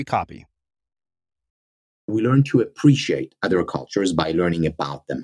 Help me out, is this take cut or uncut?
cut